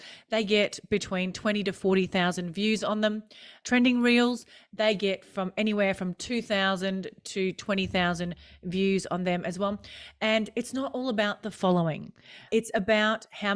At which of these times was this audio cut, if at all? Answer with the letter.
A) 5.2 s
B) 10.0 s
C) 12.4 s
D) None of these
C